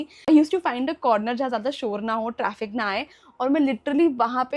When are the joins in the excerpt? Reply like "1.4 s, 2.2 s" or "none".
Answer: none